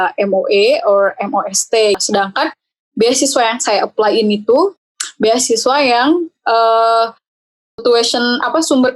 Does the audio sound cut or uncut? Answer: cut